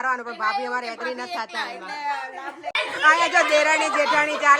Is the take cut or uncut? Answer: cut